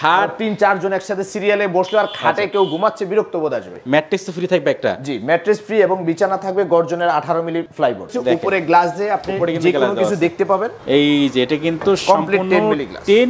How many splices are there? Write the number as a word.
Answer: three